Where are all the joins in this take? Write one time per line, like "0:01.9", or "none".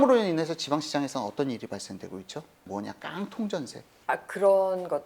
0:02.7
0:03.9